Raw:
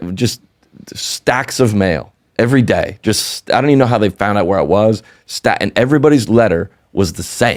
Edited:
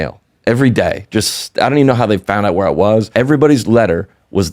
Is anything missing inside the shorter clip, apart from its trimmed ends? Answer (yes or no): yes